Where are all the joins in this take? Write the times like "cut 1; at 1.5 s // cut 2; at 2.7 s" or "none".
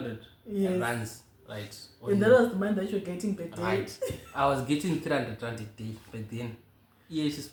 none